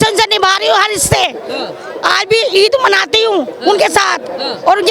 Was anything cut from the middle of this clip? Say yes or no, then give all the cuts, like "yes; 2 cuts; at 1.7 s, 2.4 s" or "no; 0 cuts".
no; 0 cuts